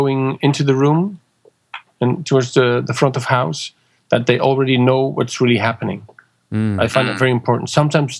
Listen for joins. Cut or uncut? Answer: uncut